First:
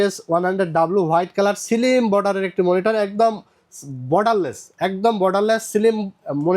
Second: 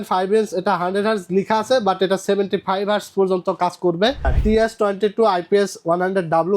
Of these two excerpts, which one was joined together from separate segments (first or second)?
second